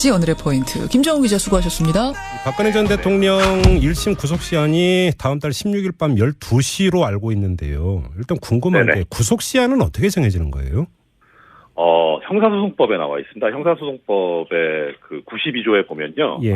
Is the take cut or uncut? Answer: cut